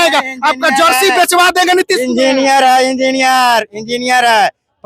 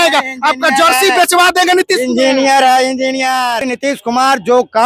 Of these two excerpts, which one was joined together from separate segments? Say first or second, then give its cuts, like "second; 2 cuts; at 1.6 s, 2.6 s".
second; 1 cut; at 3.7 s